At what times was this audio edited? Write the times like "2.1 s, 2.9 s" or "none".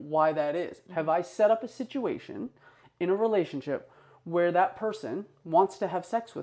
none